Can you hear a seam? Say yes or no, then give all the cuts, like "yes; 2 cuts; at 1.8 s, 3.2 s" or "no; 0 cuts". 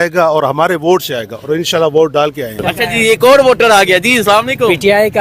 yes; 1 cut; at 2.6 s